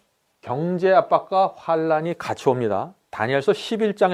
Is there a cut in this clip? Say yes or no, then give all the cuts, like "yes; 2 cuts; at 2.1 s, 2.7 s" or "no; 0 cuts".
no; 0 cuts